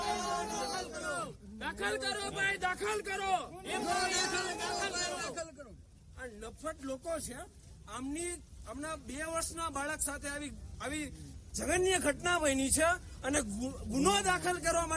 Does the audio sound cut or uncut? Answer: uncut